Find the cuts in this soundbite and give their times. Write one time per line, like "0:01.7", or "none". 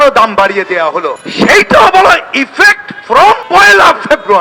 0:01.2
0:03.4